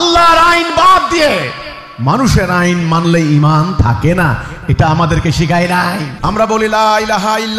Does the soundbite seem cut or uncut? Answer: cut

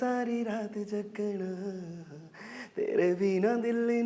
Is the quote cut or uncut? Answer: uncut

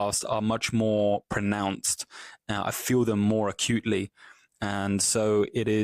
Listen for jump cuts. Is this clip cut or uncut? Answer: uncut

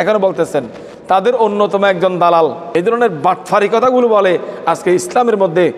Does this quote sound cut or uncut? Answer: cut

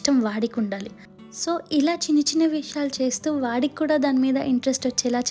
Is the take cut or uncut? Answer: uncut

